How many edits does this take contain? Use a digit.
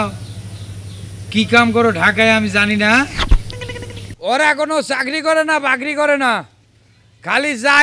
1